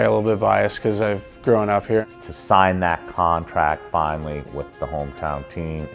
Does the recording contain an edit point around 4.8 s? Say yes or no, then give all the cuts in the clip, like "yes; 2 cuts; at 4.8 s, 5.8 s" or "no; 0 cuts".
no; 1 cut; at 2.0 s